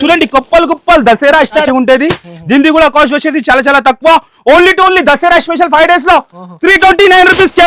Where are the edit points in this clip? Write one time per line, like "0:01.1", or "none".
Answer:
0:01.6